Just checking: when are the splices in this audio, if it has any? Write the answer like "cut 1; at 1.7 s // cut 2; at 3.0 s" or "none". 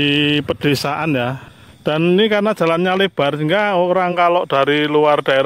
cut 1; at 1.5 s